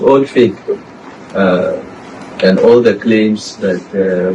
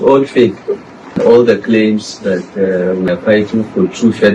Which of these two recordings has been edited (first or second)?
second